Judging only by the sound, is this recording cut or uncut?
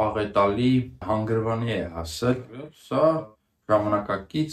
cut